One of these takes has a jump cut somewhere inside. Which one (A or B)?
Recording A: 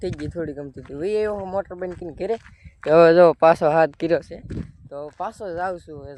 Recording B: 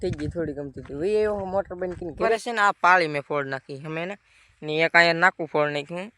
B